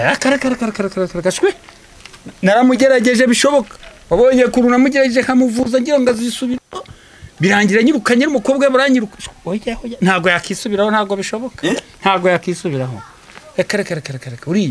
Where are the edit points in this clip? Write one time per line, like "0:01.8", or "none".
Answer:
none